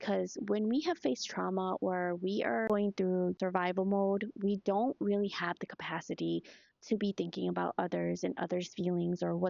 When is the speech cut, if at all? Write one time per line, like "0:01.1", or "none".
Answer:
none